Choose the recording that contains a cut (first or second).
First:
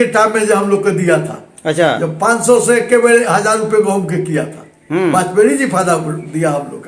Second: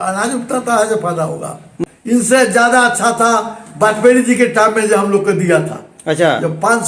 second